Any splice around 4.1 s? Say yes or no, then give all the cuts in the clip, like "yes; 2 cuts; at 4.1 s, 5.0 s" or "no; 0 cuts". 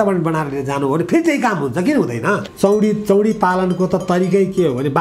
no; 1 cut; at 2.5 s